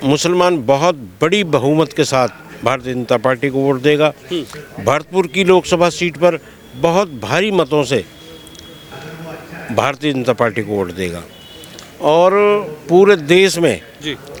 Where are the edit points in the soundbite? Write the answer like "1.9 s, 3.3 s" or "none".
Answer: none